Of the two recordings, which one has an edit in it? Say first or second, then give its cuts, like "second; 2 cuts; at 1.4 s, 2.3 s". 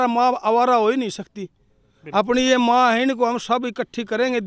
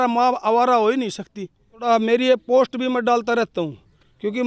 second; 1 cut; at 1.8 s